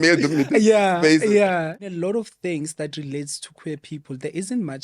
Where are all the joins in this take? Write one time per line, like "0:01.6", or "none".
0:01.8